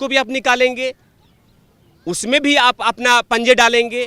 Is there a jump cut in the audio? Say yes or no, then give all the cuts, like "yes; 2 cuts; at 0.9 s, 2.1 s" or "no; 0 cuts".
no; 0 cuts